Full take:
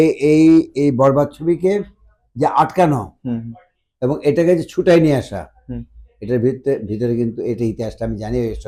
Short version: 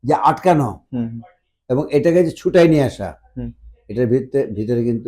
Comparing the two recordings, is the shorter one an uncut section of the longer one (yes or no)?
yes